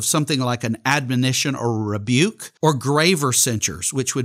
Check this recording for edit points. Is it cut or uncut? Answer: cut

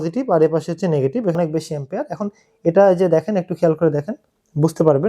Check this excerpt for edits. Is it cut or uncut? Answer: cut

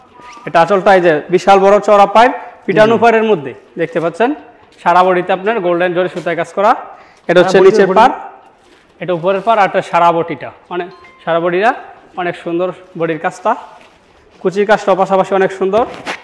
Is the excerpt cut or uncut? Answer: uncut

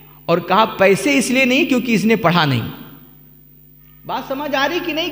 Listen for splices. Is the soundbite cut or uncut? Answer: uncut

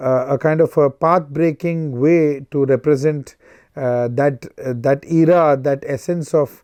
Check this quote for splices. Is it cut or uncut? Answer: uncut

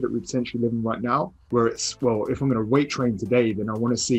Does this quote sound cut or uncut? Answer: cut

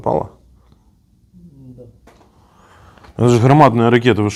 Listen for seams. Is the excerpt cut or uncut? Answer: uncut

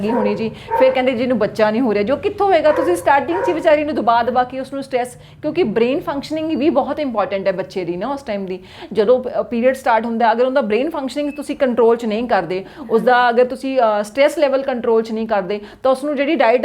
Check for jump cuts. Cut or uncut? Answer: uncut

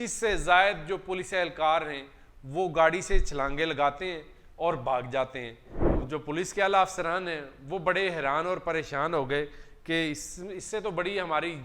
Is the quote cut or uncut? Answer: cut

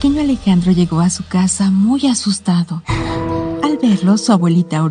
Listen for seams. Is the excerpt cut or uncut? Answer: cut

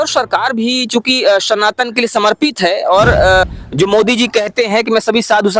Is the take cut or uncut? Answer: cut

